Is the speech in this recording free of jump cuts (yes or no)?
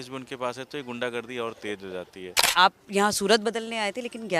no